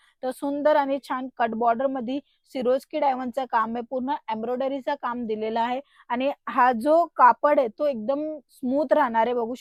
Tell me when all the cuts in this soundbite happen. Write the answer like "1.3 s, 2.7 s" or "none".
none